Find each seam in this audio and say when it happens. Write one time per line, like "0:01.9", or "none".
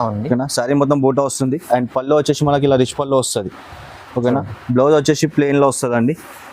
none